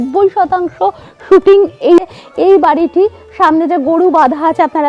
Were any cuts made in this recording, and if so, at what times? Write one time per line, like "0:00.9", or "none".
0:02.0